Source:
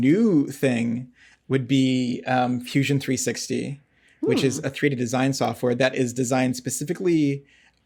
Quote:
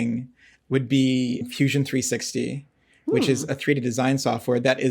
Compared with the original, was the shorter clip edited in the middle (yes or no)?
yes